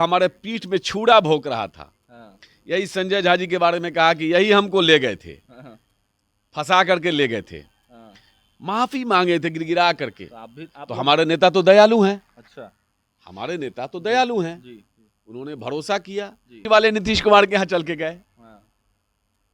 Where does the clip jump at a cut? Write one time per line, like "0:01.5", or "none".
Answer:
0:16.6